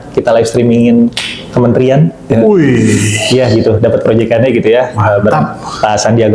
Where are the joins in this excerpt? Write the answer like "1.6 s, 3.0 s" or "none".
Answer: none